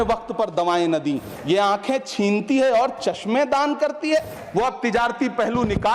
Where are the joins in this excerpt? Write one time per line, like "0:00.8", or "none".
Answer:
0:01.3
0:04.4